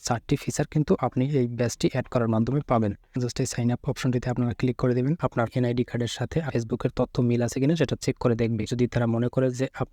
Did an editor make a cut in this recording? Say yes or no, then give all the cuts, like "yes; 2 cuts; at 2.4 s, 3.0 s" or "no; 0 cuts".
yes; 4 cuts; at 3.3 s, 5.4 s, 6.5 s, 8.7 s